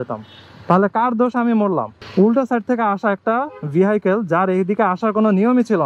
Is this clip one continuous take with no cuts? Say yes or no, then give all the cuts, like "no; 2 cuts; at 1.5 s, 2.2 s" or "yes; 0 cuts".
yes; 0 cuts